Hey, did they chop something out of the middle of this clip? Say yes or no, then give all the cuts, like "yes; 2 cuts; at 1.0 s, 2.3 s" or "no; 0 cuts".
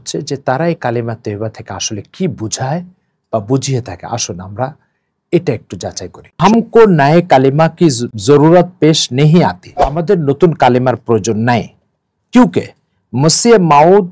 yes; 3 cuts; at 6.4 s, 8.1 s, 10.0 s